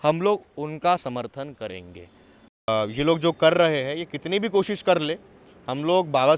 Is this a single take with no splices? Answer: no; 1 cut; at 2.7 s

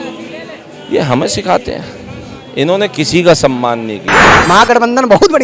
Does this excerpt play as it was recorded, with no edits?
no; 1 cut; at 4.3 s

